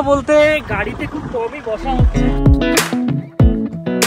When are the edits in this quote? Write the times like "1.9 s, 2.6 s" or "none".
2.0 s